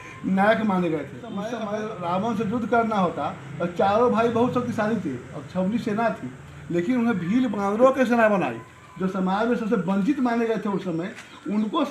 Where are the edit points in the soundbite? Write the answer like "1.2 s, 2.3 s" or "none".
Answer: 1.5 s